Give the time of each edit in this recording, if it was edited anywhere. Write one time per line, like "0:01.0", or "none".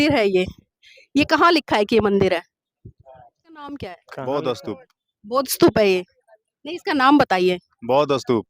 0:03.7